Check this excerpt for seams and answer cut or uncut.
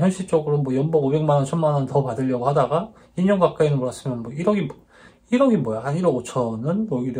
uncut